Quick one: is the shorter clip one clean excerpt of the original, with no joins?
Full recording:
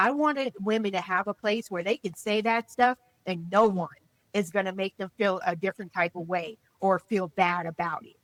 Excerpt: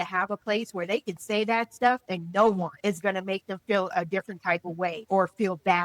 no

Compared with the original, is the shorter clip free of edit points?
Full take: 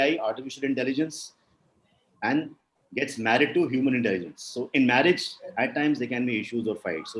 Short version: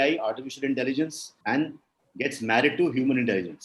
no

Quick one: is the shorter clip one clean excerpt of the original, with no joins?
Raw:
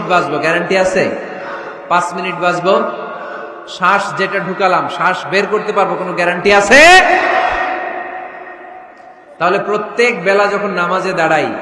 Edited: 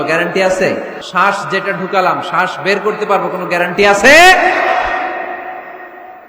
no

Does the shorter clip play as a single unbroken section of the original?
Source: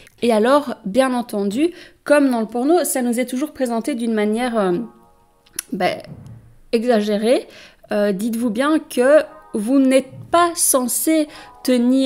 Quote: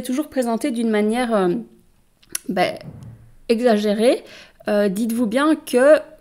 yes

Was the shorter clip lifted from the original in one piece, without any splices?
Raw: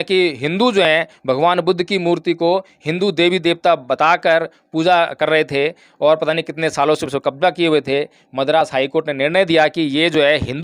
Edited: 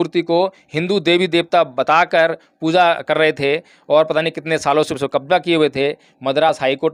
yes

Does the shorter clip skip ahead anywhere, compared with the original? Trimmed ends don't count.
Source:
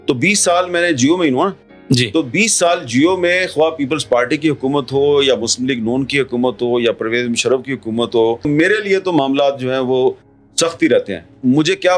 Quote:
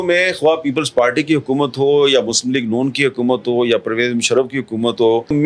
no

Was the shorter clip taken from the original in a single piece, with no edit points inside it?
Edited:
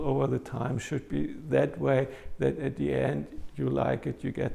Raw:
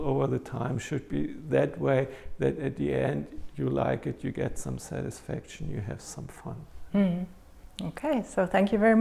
yes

